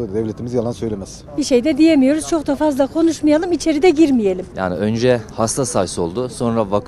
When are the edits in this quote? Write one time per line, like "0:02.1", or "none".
0:01.1
0:04.5